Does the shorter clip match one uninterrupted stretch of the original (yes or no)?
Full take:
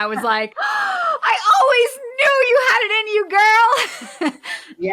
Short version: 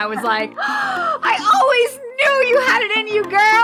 yes